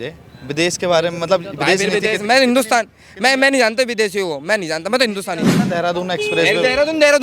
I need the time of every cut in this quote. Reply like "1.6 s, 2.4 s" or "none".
5.5 s